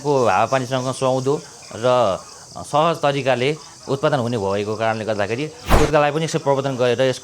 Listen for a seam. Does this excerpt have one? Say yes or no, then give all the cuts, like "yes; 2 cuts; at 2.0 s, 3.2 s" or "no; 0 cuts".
yes; 1 cut; at 5.6 s